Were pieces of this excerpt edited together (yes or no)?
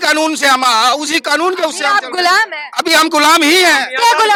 no